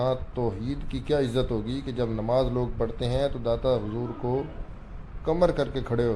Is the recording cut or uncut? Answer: uncut